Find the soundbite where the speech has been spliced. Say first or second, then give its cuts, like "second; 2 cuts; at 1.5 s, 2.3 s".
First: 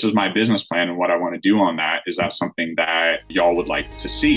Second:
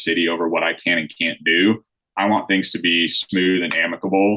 first; 1 cut; at 3.3 s